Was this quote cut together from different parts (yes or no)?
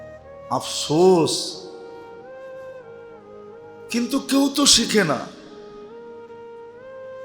yes